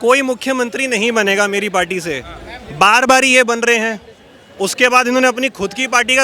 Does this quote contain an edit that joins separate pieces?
no; 0 cuts

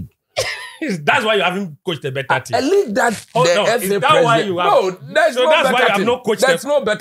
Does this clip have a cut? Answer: no; 0 cuts

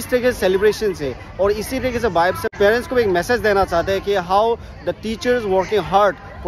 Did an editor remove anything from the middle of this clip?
yes; 1 cut; at 2.6 s

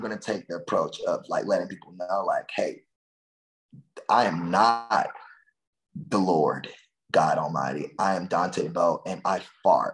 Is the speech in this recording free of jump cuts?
yes; 0 cuts

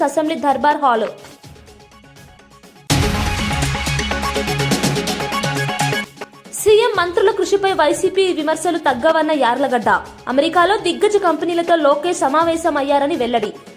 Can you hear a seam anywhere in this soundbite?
yes; 2 cuts; at 2.7 s, 6.1 s

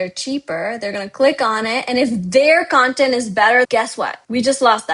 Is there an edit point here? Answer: yes; 1 cut; at 3.7 s

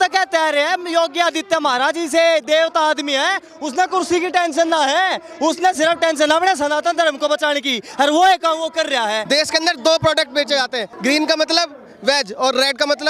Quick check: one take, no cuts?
no; 2 cuts; at 9.2 s, 10.9 s

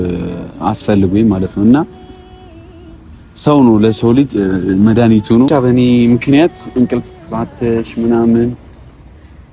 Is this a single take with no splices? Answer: no; 1 cut; at 5.5 s

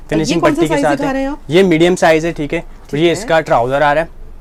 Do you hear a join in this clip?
no; 0 cuts

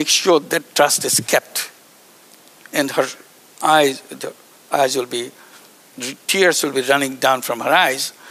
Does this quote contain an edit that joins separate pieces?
no; 0 cuts

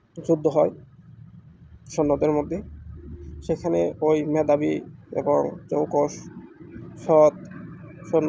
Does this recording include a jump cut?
no; 0 cuts

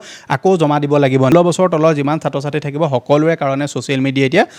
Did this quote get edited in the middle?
yes; 1 cut; at 1.3 s

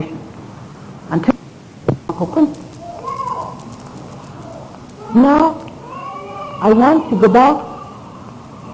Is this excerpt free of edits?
no; 1 cut; at 2.7 s

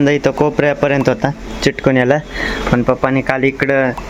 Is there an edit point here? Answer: no; 0 cuts

